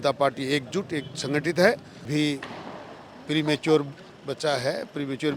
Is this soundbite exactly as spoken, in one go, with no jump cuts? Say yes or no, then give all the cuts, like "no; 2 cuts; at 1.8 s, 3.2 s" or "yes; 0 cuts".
no; 1 cut; at 2.1 s